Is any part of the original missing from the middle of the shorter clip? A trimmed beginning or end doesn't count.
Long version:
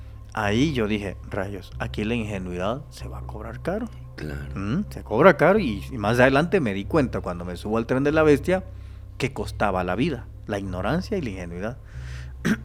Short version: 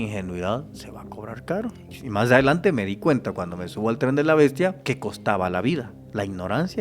yes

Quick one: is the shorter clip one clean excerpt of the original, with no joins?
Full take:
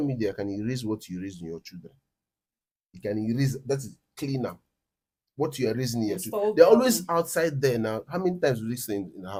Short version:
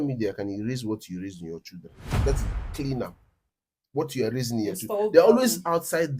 no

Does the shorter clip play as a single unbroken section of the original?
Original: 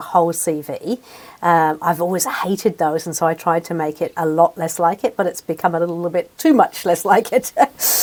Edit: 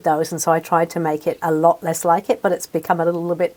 yes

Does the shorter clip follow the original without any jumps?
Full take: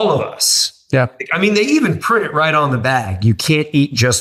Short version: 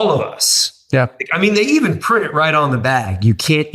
yes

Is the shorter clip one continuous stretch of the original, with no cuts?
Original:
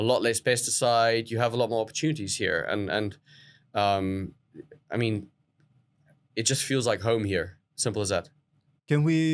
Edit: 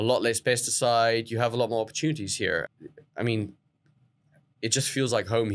no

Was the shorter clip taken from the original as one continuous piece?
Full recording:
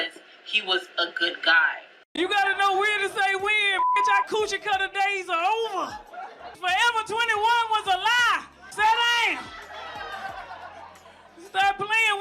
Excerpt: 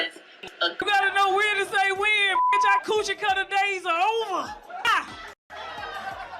no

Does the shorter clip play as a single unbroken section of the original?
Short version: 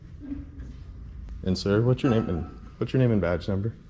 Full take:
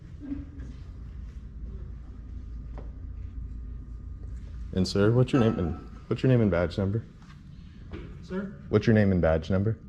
no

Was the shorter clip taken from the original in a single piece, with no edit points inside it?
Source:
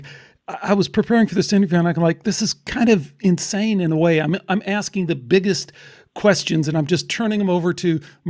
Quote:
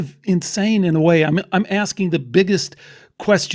yes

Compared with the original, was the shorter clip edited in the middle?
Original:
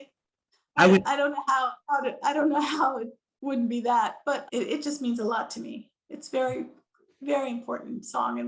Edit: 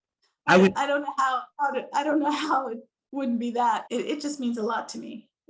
yes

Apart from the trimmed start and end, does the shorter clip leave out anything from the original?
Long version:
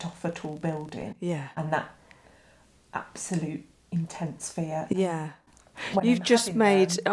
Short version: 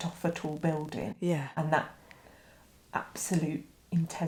no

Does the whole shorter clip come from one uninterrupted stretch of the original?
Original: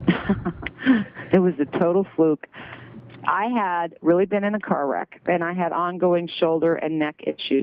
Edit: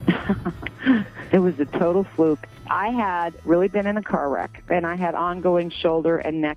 no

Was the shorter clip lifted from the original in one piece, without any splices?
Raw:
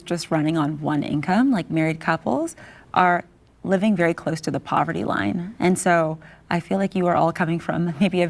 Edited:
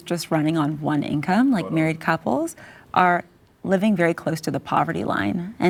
yes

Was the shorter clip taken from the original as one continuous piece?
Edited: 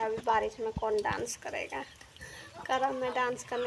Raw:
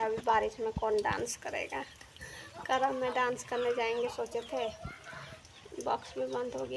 yes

